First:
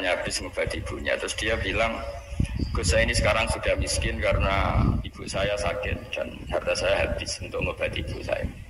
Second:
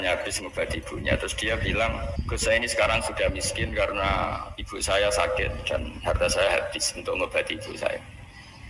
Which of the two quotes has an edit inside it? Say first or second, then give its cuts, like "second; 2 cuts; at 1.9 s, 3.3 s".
second; 1 cut; at 2.3 s